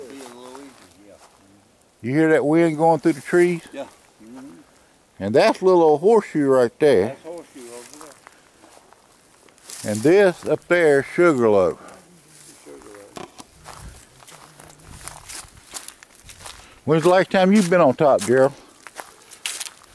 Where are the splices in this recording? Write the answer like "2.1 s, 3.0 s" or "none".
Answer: 13.8 s